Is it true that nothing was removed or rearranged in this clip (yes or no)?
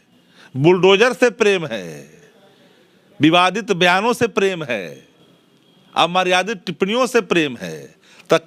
yes